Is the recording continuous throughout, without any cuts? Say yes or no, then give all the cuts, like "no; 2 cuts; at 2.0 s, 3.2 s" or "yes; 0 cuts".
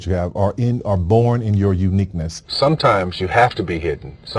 no; 1 cut; at 2.4 s